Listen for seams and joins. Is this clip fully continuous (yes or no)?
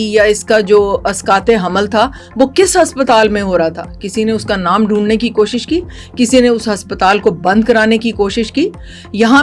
yes